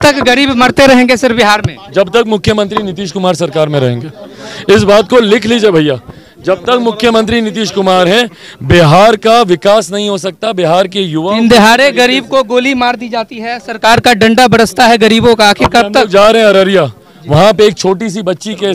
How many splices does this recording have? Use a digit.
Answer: 0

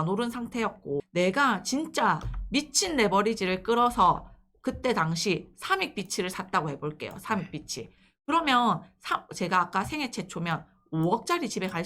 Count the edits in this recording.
1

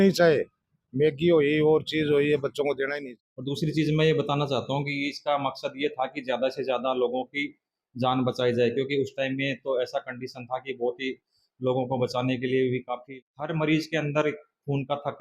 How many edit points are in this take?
2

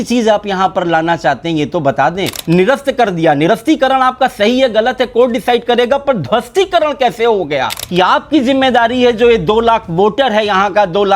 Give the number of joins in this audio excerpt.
2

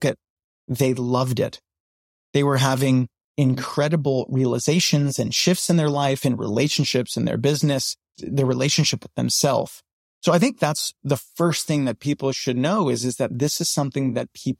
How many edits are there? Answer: 2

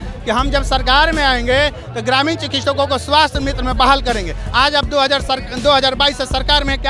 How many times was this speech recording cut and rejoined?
0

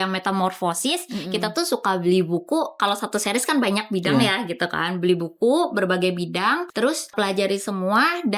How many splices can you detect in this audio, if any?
2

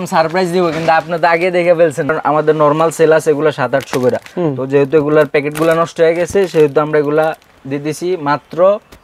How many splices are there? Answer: 1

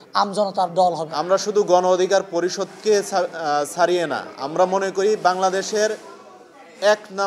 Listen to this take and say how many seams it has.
1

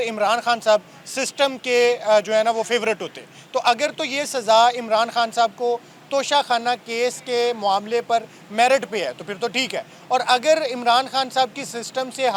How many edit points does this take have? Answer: 0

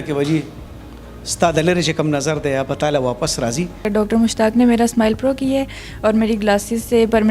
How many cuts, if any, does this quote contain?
1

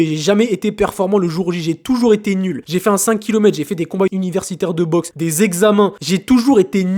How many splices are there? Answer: 4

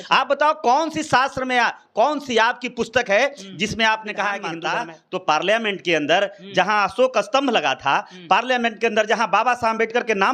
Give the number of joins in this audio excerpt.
1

